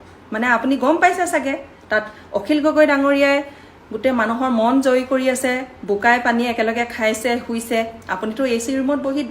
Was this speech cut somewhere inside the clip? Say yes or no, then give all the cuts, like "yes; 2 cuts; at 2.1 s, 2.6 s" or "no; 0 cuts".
no; 0 cuts